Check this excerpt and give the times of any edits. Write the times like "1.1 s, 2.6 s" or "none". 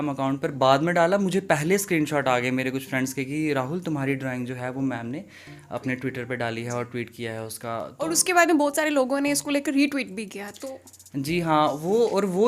none